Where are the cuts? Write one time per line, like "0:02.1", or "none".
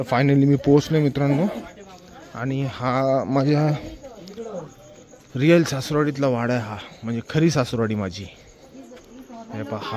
none